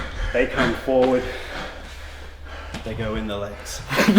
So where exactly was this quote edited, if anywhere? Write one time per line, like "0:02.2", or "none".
none